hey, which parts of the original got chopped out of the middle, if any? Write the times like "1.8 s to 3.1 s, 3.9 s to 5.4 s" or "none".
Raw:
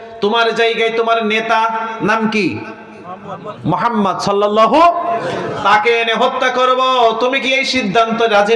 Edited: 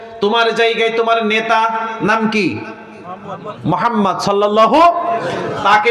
none